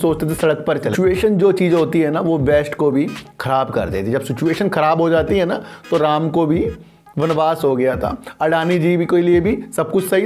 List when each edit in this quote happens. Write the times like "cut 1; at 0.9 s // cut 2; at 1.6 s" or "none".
cut 1; at 0.9 s